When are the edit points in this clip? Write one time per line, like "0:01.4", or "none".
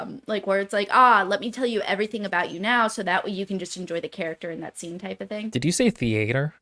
0:05.5